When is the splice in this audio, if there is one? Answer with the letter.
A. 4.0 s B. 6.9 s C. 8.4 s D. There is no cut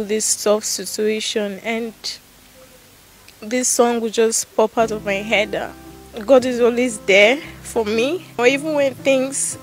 C